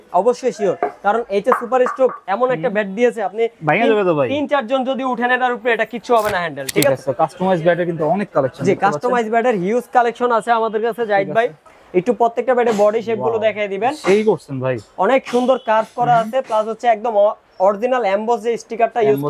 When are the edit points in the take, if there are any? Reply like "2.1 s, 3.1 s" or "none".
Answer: 6.6 s, 11.7 s